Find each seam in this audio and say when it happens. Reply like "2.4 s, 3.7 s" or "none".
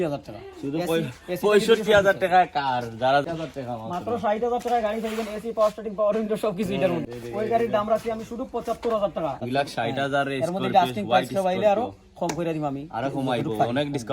3.2 s, 7.0 s, 9.4 s